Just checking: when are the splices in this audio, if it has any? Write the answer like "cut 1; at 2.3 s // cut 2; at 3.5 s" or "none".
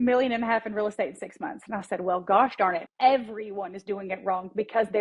cut 1; at 2.9 s